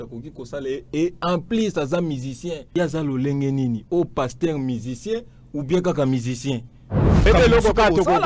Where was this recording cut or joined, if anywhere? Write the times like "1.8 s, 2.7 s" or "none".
2.6 s, 7.3 s